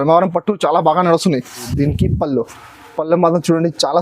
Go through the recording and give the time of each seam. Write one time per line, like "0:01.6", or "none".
0:01.7